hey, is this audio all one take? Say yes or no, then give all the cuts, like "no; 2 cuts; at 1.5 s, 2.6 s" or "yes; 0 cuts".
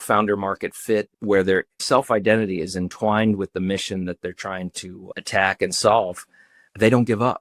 no; 1 cut; at 1.1 s